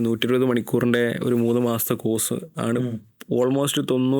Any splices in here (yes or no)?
no